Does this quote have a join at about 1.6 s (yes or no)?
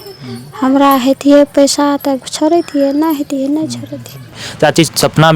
no